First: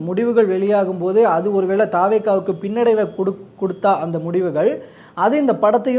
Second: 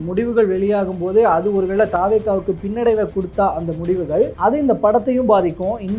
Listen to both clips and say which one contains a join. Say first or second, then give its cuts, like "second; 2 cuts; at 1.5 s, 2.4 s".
second; 2 cuts; at 3.1 s, 4.3 s